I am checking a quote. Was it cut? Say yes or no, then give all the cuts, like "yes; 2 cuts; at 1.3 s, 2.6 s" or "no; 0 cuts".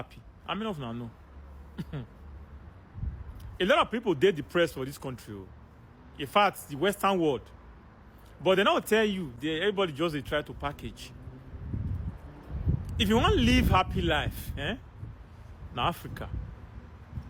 no; 0 cuts